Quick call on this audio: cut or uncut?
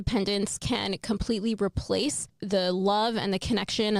cut